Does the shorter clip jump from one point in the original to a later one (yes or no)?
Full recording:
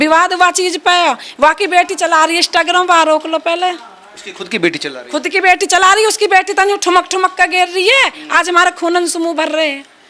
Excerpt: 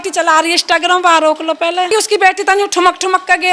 yes